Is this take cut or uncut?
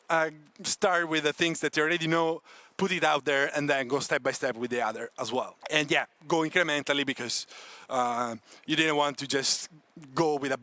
cut